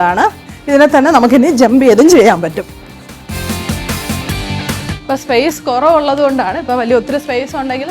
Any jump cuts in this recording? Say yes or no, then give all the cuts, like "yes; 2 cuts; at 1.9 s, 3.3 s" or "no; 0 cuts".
yes; 2 cuts; at 3.3 s, 4.9 s